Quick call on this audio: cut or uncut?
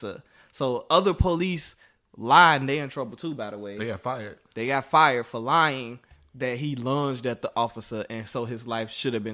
uncut